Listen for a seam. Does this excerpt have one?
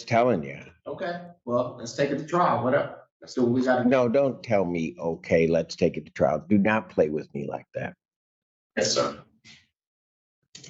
no; 0 cuts

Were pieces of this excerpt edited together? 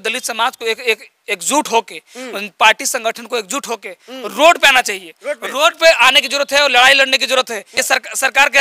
yes; 1 cut; at 7.7 s

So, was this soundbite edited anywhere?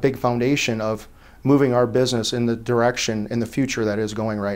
no; 0 cuts

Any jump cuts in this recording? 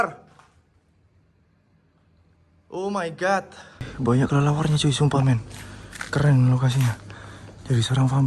yes; 1 cut; at 3.9 s

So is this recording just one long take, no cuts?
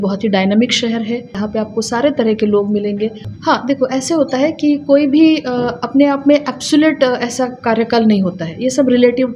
no; 2 cuts; at 1.4 s, 3.2 s

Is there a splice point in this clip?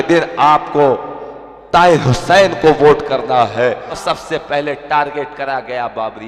yes; 1 cut; at 3.9 s

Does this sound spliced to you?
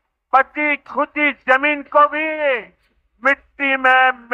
no; 0 cuts

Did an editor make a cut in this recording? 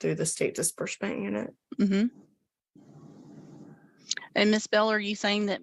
no; 0 cuts

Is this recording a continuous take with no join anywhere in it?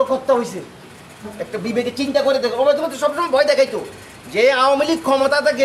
yes; 0 cuts

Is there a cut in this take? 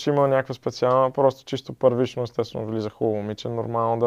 no; 0 cuts

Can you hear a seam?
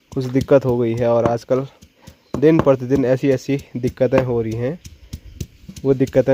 no; 0 cuts

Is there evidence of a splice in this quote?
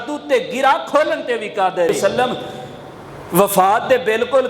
yes; 1 cut; at 2.1 s

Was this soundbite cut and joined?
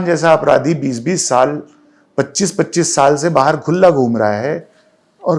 no; 0 cuts

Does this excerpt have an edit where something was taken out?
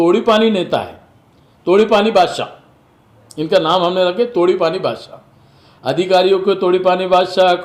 no; 0 cuts

